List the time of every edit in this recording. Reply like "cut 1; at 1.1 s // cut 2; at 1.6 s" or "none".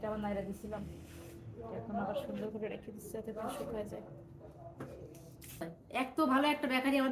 cut 1; at 5.6 s